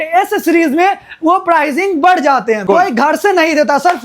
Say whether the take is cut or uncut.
cut